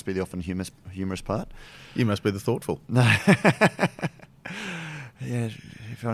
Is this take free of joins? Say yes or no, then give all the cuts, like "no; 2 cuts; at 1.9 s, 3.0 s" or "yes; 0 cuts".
yes; 0 cuts